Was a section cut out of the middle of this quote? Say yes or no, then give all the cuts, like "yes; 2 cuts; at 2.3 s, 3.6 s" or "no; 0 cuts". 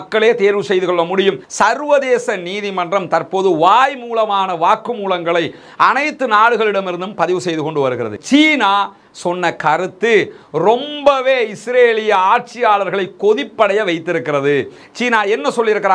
yes; 2 cuts; at 1.5 s, 8.2 s